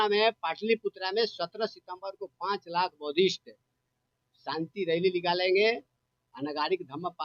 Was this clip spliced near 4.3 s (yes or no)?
no